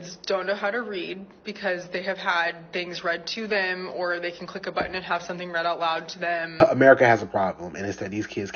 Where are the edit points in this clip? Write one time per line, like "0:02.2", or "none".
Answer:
0:06.6